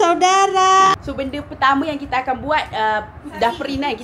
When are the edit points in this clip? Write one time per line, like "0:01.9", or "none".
0:00.9